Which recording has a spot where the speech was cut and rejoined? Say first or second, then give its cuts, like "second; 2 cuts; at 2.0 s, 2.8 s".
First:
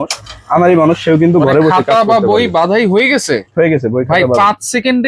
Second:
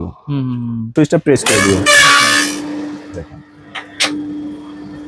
second; 1 cut; at 0.9 s